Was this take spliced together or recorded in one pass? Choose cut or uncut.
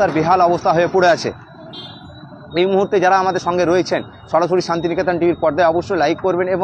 uncut